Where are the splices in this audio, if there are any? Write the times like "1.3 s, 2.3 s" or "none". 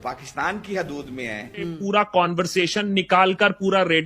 1.8 s